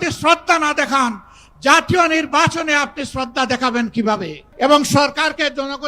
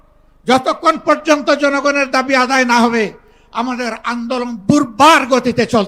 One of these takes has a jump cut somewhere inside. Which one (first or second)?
first